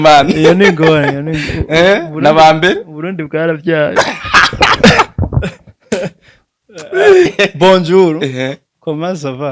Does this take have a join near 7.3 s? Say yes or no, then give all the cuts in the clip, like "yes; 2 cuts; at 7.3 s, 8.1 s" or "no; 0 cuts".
yes; 1 cut; at 7.3 s